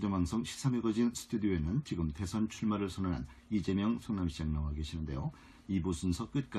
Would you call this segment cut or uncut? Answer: uncut